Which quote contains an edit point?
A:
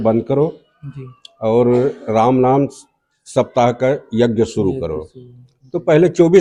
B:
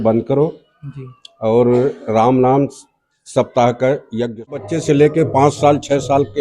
B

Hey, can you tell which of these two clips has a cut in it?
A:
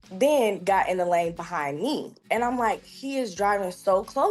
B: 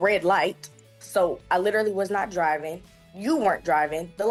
A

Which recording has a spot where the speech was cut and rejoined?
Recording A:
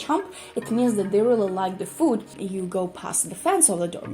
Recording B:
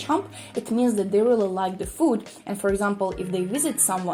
A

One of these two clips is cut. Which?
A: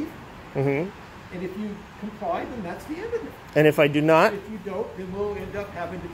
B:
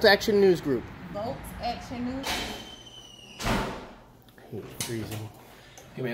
B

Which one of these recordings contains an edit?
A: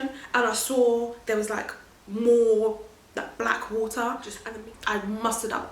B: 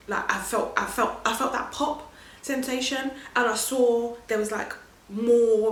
A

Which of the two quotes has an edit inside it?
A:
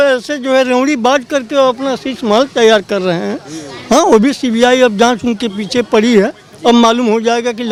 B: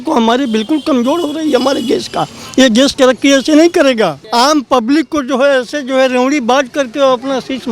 B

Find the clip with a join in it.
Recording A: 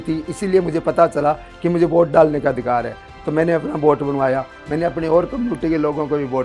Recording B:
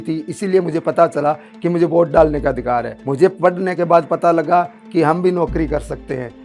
B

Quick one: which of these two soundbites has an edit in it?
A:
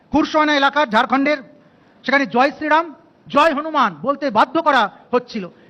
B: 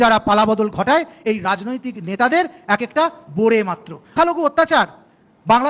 B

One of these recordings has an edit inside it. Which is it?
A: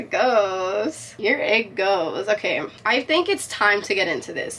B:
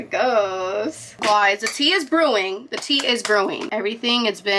B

